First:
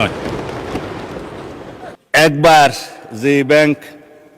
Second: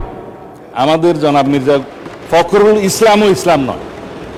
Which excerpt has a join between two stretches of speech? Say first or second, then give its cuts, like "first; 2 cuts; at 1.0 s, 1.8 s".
first; 1 cut; at 2.0 s